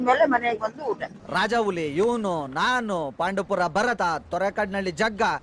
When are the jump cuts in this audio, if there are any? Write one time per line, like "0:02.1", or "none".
0:01.2